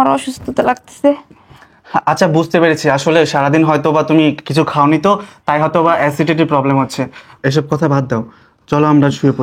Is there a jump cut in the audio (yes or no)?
no